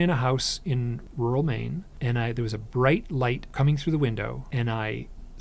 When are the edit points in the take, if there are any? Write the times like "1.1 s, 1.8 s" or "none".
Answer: 1.0 s, 1.9 s, 3.5 s, 4.4 s

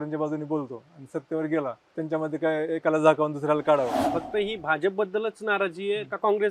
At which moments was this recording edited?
1.8 s, 4.0 s

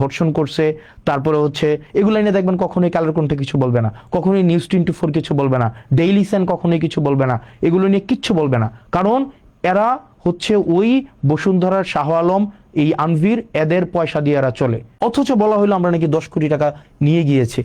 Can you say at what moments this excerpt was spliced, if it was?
14.9 s

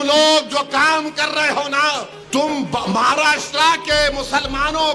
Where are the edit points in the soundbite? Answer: 2.2 s

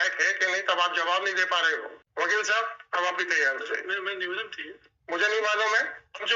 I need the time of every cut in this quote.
2.0 s

